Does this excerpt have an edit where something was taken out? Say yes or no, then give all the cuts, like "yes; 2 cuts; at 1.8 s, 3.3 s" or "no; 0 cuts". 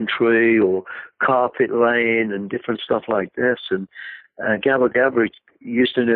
no; 0 cuts